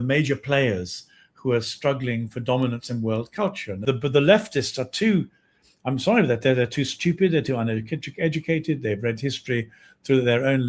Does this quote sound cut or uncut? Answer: cut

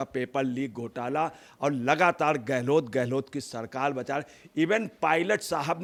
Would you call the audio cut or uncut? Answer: uncut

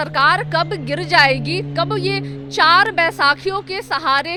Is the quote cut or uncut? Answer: uncut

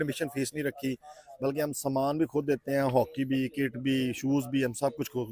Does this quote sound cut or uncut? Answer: uncut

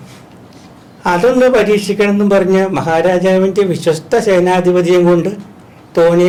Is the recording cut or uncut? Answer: uncut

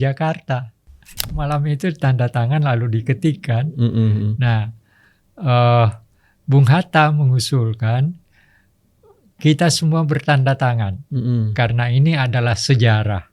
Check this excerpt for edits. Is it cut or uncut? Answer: cut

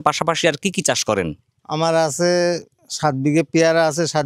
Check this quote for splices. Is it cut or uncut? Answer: uncut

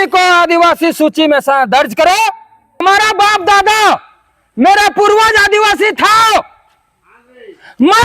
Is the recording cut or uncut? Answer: cut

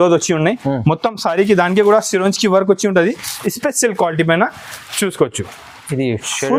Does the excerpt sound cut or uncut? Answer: uncut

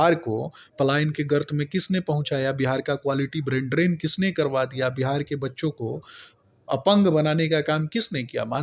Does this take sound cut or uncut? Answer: uncut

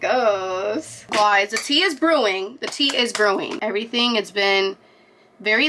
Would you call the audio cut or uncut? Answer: cut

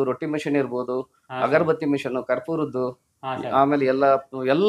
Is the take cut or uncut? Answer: uncut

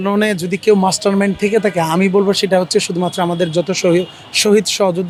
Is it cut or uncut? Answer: uncut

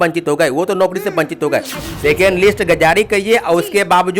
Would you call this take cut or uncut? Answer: cut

